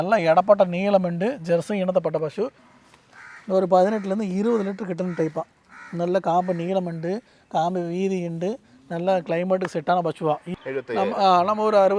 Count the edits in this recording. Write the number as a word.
two